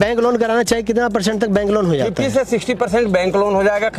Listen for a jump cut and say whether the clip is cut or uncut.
uncut